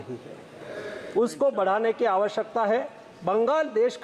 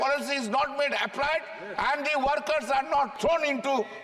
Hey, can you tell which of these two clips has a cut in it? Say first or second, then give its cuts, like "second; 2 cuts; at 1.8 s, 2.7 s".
second; 1 cut; at 3.1 s